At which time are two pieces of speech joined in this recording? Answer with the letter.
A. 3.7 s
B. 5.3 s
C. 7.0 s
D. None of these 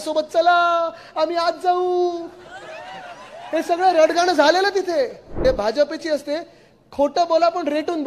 B